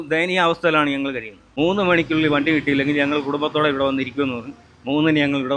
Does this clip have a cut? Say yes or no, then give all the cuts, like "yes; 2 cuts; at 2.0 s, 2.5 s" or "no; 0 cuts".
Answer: no; 0 cuts